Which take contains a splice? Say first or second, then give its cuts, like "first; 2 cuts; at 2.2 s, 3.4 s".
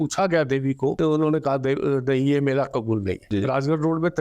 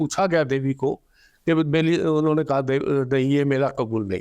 first; 2 cuts; at 1.0 s, 3.2 s